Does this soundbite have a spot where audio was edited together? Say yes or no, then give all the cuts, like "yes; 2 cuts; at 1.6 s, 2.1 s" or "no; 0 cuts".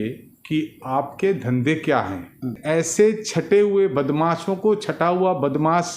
yes; 1 cut; at 2.6 s